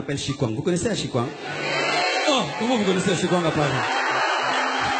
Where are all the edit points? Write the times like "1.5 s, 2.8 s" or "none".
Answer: none

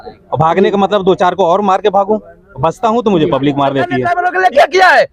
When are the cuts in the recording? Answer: 4.0 s

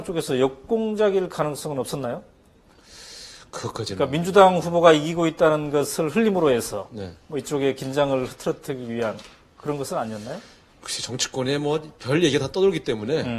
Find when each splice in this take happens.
7.9 s

